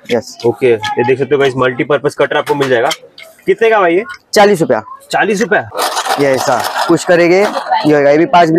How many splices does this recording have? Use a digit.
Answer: 1